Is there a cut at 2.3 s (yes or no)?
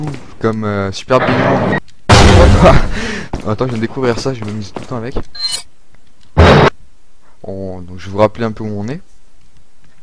yes